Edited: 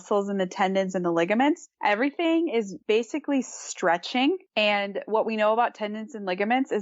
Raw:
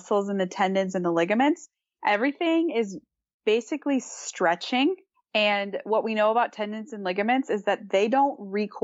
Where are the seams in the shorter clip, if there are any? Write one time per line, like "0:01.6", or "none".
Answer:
0:01.7
0:02.7
0:04.5